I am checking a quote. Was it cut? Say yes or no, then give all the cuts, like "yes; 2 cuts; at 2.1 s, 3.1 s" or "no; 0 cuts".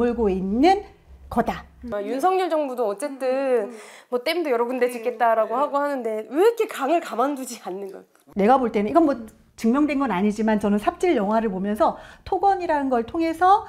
no; 0 cuts